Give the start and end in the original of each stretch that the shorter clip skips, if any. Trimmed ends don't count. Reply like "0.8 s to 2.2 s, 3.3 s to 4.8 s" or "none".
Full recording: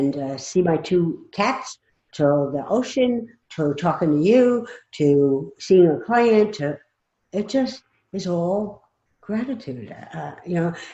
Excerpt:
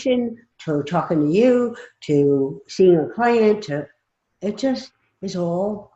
none